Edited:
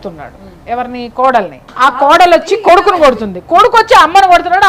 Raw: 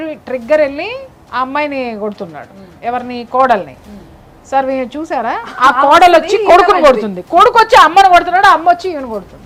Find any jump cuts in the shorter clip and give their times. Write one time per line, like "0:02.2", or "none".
0:01.7